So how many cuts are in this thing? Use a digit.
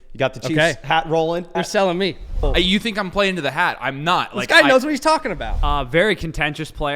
3